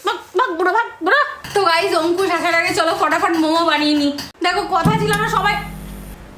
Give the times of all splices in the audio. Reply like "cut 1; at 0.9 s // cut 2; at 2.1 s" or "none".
cut 1; at 1.3 s // cut 2; at 4.3 s

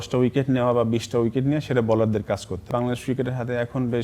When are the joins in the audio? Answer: cut 1; at 2.7 s

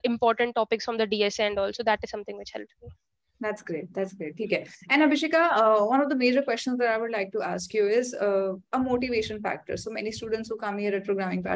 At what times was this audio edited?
none

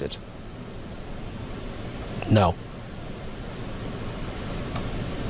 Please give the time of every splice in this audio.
none

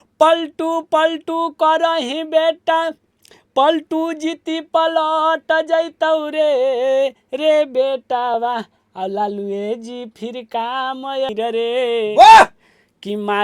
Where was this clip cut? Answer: cut 1; at 11.3 s

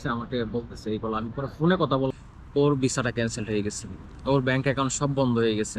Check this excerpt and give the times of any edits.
cut 1; at 2.1 s

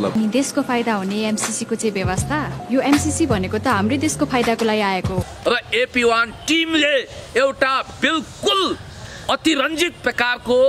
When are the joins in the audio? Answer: cut 1; at 5.3 s

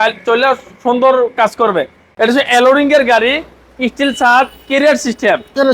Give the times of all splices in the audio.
cut 1; at 2.0 s

